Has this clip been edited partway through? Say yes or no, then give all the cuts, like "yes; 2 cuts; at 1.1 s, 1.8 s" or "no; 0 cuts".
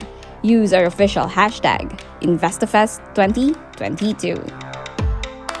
yes; 1 cut; at 4.6 s